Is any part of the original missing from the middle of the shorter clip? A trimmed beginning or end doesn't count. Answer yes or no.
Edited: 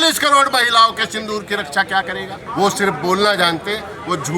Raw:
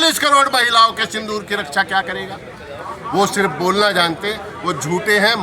yes